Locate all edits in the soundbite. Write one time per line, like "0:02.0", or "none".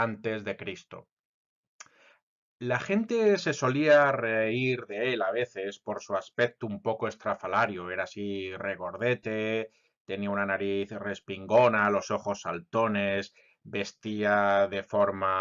0:06.3